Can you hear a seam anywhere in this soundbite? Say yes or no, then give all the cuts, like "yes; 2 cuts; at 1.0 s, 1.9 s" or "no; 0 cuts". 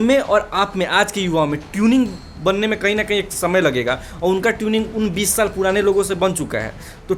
no; 0 cuts